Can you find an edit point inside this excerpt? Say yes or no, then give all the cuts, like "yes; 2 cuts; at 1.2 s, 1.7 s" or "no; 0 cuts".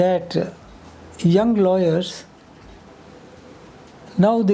no; 0 cuts